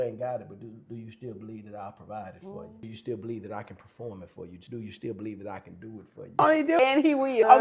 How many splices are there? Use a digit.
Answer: 1